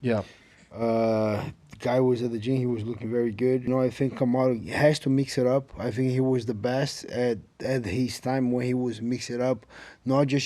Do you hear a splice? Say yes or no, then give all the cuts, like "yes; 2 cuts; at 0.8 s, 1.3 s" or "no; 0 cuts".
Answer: yes; 1 cut; at 3.7 s